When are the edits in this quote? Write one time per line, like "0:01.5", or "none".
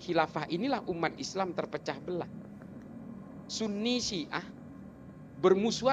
none